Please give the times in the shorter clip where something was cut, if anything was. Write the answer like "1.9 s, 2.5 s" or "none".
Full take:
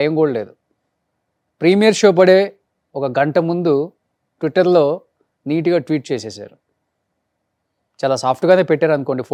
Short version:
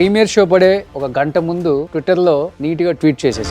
1.4 s, 2.6 s